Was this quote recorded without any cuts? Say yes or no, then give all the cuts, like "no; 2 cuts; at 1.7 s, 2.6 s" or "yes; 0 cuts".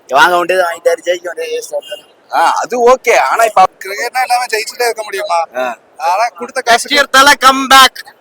no; 1 cut; at 3.7 s